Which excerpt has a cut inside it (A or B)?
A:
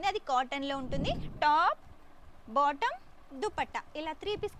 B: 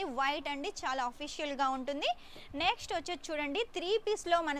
A